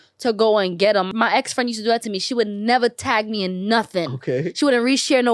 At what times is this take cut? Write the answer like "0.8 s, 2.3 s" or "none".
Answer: 1.1 s